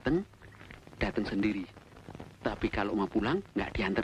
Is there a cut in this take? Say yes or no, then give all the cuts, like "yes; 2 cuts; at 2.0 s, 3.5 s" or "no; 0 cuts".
no; 0 cuts